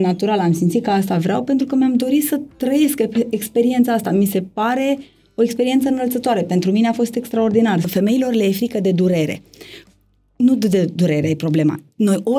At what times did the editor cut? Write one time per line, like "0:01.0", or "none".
0:07.9